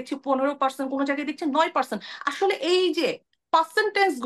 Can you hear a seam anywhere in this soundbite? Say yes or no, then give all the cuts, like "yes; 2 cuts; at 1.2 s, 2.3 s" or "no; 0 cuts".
no; 0 cuts